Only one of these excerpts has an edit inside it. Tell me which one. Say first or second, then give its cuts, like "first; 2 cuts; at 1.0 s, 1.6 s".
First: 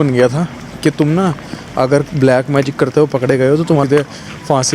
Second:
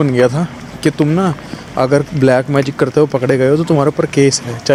first; 1 cut; at 3.8 s